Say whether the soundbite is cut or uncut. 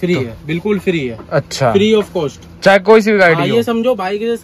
uncut